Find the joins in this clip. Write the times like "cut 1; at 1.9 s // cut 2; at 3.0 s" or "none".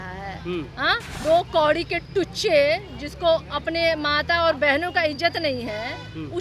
cut 1; at 1.1 s